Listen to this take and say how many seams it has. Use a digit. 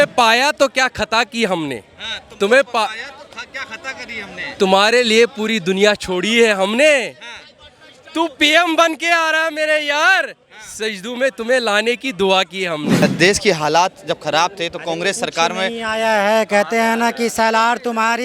1